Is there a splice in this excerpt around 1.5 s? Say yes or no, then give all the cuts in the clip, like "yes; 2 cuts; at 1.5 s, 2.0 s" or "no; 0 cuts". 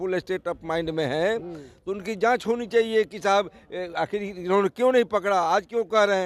no; 0 cuts